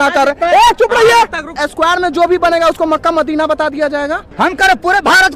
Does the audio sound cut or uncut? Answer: cut